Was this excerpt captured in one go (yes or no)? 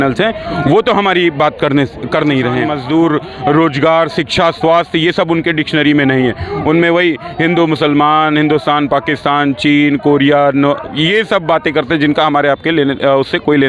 no